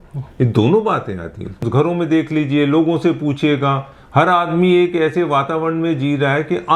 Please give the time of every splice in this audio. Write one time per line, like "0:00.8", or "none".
0:01.6